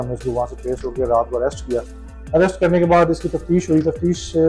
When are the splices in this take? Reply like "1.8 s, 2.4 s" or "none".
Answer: none